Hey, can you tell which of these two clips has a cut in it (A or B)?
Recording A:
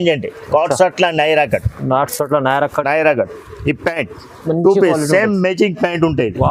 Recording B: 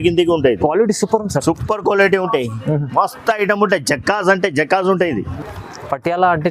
B